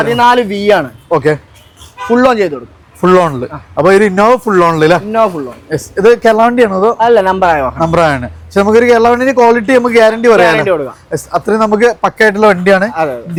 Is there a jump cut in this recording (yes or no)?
no